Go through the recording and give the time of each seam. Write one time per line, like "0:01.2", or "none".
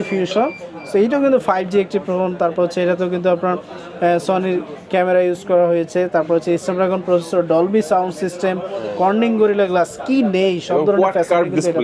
none